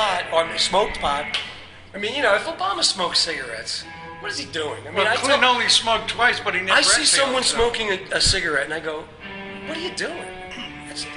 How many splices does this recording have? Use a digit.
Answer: 0